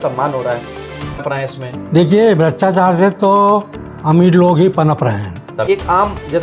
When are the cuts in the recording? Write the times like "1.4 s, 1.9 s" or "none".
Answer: 1.2 s, 5.7 s